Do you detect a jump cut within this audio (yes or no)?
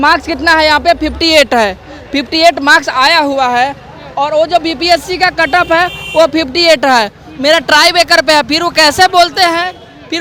no